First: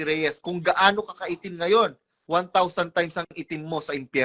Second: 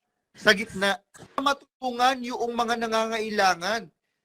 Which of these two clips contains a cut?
second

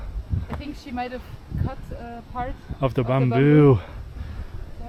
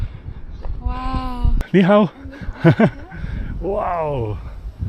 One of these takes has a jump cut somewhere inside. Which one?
second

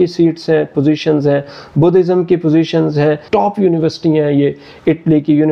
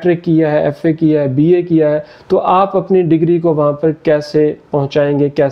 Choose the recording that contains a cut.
first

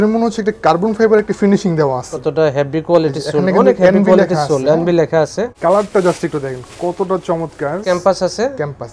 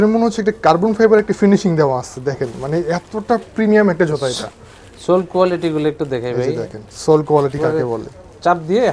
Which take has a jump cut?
first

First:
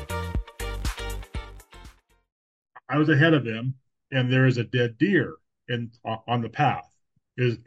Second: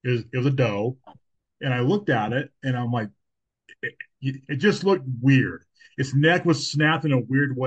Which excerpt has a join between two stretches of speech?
first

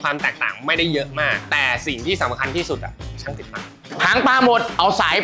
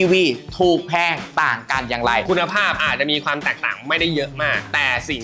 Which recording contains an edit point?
second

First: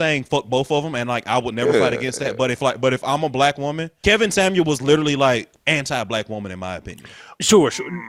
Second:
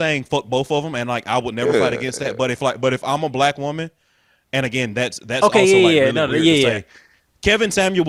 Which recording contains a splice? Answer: first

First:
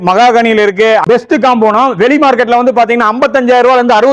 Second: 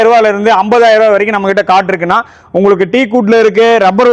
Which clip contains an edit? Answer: first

